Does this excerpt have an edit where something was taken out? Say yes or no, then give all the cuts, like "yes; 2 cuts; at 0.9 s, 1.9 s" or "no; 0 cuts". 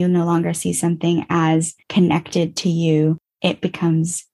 yes; 1 cut; at 1.8 s